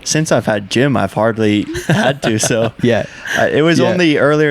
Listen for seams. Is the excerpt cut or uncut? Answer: uncut